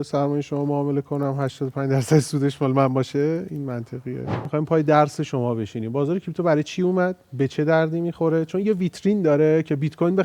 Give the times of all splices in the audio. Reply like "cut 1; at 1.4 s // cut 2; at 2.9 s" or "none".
cut 1; at 4.4 s